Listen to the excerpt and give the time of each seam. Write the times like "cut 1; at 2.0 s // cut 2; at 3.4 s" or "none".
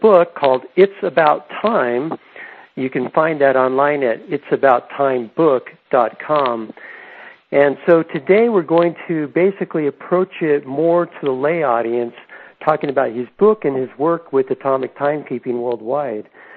none